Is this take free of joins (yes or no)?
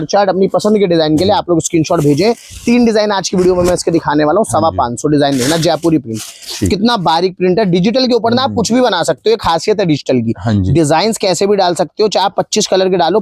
yes